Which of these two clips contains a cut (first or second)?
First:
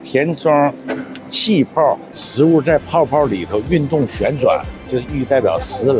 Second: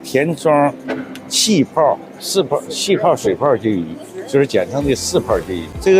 first